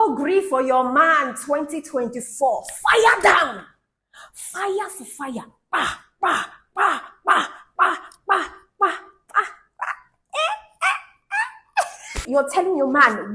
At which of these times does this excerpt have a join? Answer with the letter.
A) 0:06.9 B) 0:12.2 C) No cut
B